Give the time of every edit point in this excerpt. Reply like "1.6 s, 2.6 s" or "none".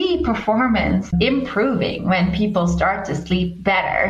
1.1 s